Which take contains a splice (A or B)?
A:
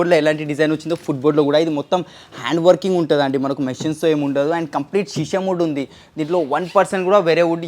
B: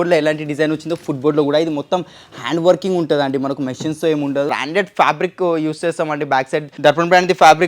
B